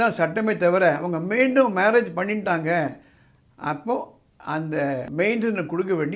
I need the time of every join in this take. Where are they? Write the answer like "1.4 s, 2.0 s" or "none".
5.1 s